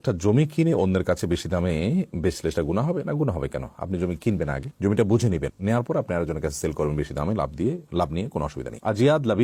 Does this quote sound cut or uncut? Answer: uncut